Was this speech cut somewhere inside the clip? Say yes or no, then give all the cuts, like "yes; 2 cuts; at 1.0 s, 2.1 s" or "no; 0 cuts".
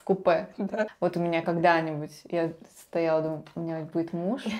yes; 1 cut; at 0.9 s